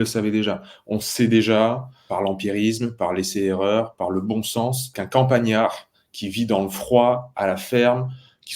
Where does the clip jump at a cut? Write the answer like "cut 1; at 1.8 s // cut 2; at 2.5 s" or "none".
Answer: cut 1; at 2.0 s // cut 2; at 4.9 s

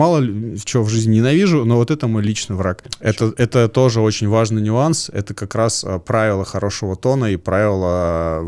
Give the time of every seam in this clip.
cut 1; at 2.9 s

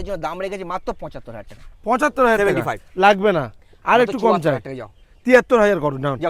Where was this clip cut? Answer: none

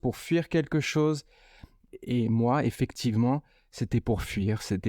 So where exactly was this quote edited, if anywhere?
cut 1; at 1.9 s

